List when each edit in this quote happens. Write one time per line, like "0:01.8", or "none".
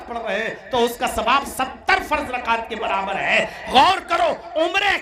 none